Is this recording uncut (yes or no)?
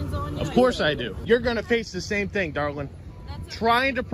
no